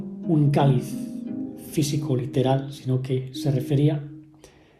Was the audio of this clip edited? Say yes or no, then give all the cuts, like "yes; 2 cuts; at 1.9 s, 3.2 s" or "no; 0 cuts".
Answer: no; 0 cuts